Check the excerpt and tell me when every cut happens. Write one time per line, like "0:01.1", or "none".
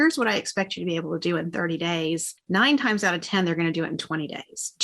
0:02.3